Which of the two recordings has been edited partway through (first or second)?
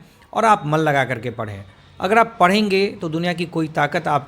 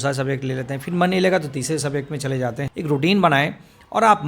second